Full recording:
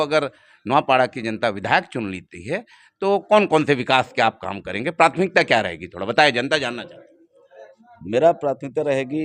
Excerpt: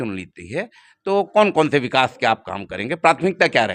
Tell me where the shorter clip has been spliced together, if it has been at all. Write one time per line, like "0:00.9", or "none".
none